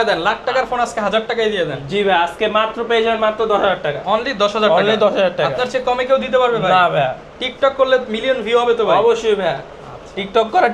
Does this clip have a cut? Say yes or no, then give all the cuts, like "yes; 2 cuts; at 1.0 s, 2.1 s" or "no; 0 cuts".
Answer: no; 0 cuts